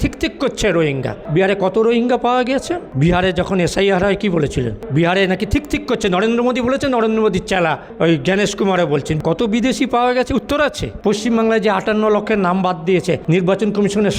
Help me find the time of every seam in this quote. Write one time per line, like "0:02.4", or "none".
0:01.2
0:02.9
0:04.8
0:09.2
0:10.9
0:13.2